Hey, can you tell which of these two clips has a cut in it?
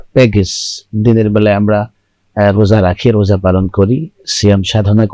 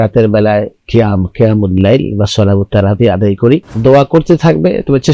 second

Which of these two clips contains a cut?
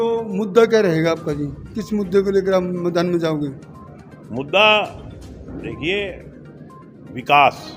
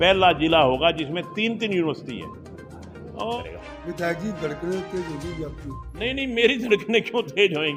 second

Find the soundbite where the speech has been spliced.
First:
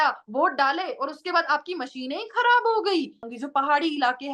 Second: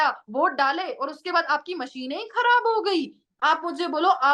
first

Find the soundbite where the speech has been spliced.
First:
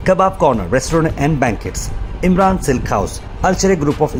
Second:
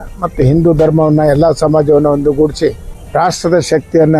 second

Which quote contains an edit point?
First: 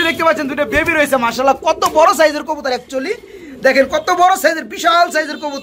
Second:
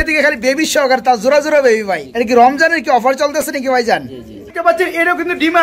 second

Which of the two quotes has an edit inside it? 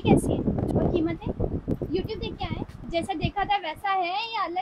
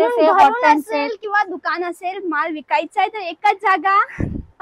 first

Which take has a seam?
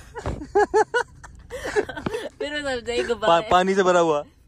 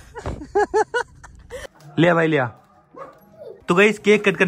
second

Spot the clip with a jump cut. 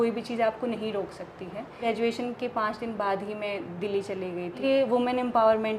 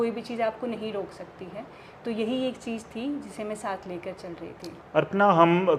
first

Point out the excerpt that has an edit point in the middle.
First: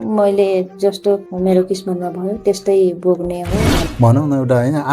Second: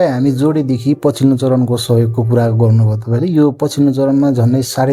first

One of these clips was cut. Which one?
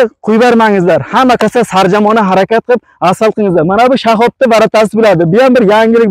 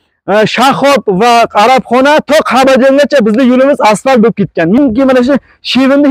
second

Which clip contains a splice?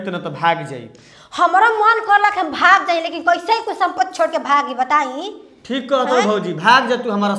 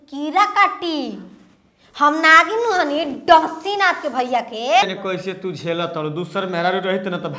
second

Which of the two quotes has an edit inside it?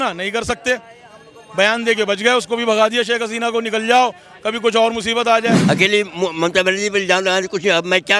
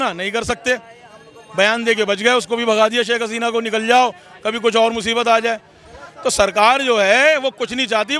first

